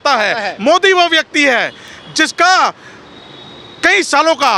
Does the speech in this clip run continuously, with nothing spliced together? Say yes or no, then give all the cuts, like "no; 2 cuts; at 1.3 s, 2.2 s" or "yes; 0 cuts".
yes; 0 cuts